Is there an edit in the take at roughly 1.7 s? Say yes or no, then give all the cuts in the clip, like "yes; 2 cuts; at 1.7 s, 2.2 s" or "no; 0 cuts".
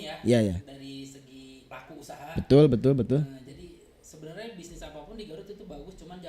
yes; 1 cut; at 1.7 s